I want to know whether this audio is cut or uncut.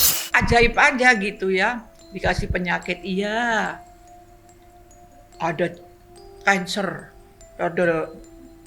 uncut